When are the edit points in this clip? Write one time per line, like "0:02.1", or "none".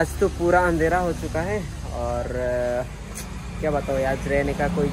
none